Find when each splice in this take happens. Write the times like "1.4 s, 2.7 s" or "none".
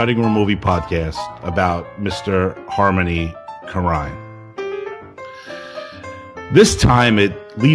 6.4 s